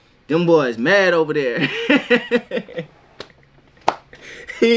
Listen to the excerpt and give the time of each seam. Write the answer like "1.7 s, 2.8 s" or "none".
none